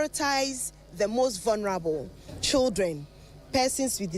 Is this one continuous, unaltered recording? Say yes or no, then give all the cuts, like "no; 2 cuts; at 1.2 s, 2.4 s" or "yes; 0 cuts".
no; 1 cut; at 2.4 s